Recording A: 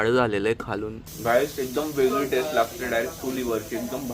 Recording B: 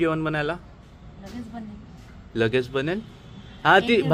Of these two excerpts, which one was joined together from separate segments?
A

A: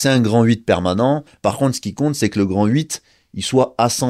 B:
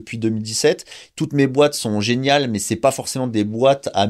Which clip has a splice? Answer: A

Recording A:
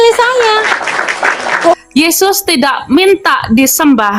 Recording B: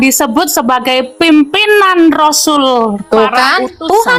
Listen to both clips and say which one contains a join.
A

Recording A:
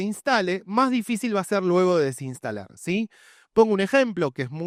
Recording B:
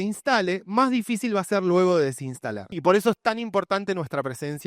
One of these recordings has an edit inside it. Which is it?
B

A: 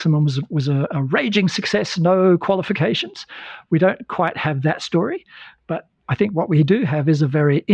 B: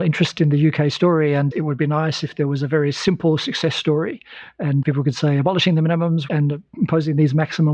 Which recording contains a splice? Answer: B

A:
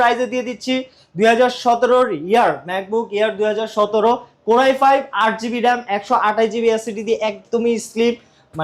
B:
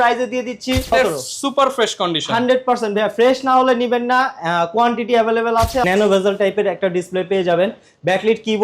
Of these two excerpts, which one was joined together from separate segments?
B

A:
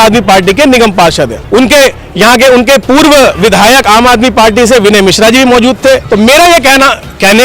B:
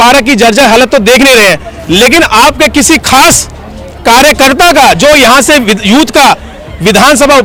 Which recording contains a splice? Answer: A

